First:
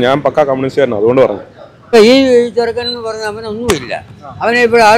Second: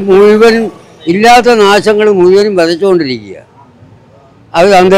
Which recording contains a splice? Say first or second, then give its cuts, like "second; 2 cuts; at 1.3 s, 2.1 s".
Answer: first; 1 cut; at 1.9 s